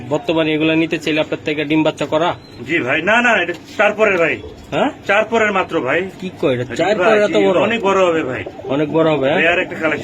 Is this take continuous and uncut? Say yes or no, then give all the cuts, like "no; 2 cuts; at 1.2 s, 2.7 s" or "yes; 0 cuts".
yes; 0 cuts